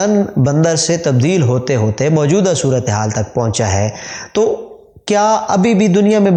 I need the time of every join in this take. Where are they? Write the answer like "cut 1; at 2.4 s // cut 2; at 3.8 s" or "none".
none